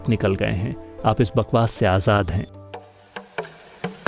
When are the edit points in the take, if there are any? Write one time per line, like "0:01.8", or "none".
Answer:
0:02.5